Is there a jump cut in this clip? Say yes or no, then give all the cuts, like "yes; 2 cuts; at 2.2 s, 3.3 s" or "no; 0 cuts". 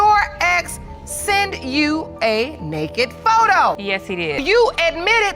yes; 1 cut; at 4.3 s